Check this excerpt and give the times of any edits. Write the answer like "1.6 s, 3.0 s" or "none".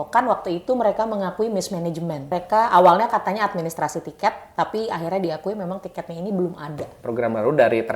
2.3 s, 6.9 s